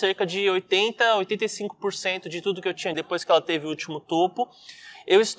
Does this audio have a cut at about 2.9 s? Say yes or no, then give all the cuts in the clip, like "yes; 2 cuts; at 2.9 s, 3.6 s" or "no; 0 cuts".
yes; 1 cut; at 2.9 s